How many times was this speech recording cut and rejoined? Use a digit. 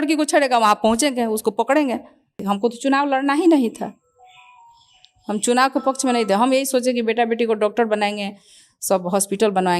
1